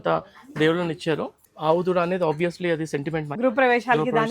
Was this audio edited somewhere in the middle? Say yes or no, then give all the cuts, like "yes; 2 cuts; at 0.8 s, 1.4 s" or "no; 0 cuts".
yes; 2 cuts; at 1.4 s, 3.3 s